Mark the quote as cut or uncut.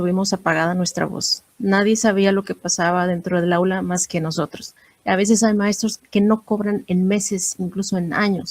cut